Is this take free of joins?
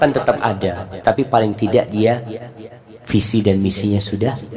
yes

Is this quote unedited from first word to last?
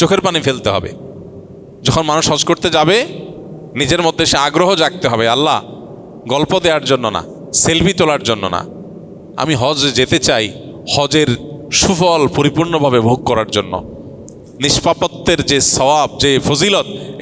yes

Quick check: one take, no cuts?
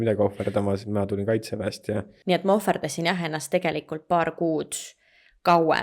no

